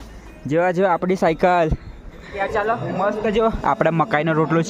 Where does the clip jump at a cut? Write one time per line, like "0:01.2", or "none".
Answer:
0:02.3